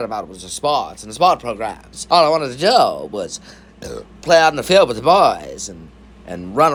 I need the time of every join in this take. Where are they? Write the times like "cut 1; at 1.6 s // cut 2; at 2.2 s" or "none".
none